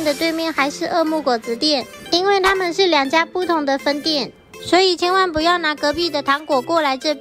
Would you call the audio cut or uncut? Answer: uncut